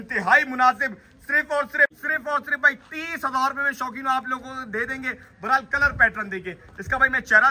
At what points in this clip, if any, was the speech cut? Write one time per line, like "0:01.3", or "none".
0:02.0